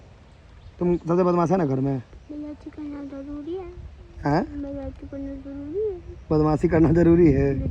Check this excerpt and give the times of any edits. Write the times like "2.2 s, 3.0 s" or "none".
none